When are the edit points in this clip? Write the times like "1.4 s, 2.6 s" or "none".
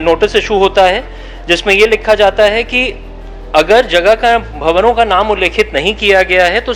none